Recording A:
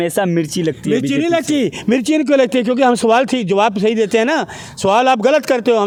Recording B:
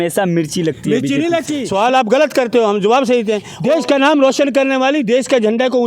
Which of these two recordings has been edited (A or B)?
B